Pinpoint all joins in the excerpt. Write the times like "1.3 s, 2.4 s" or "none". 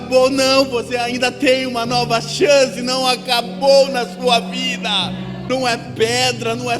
5.4 s